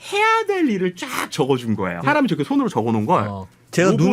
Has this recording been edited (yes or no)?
yes